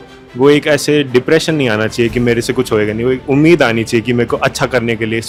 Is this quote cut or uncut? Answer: uncut